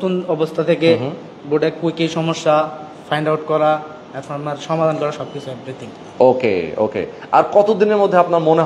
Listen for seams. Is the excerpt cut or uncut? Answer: uncut